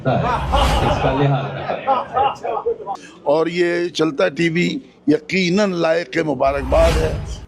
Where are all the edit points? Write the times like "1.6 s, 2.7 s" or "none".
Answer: 2.9 s